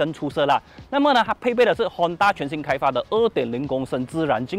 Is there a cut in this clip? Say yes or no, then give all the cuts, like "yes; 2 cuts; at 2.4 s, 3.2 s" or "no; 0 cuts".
no; 0 cuts